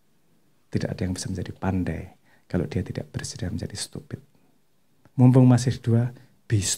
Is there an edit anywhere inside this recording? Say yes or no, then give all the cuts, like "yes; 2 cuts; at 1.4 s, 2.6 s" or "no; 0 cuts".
no; 0 cuts